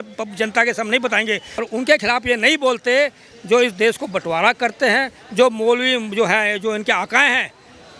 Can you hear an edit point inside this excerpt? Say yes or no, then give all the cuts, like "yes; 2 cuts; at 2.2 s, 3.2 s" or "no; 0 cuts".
yes; 1 cut; at 1.6 s